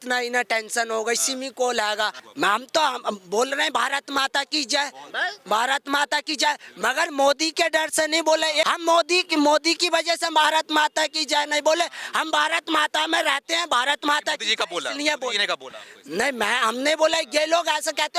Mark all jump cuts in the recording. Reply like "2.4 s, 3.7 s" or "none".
2.2 s, 8.6 s